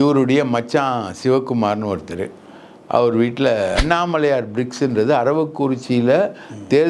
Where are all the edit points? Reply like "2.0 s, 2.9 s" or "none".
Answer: 3.8 s